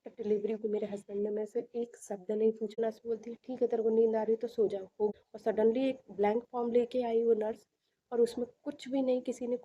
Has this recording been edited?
yes; 2 cuts; at 2.8 s, 5.2 s

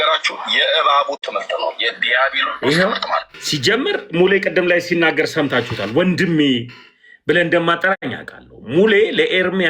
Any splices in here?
yes; 1 cut; at 3.4 s

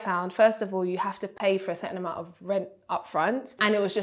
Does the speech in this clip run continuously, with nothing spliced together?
yes; 0 cuts

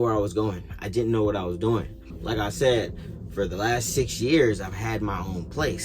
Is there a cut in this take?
yes; 1 cut; at 2.1 s

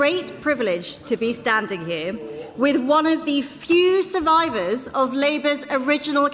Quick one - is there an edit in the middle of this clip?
no; 0 cuts

